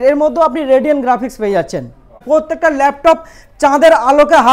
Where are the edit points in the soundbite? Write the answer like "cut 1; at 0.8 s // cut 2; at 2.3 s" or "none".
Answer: cut 1; at 2.2 s